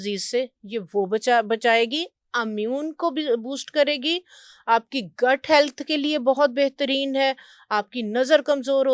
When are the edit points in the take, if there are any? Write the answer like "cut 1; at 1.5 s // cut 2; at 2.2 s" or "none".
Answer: none